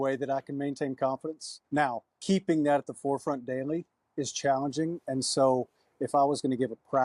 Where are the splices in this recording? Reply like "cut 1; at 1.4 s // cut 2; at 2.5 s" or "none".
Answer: cut 1; at 2.1 s